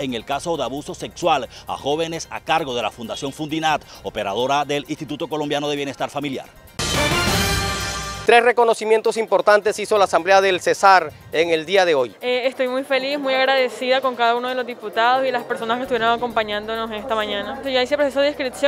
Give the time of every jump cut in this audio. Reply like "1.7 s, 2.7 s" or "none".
6.7 s, 8.1 s, 12.2 s, 17.6 s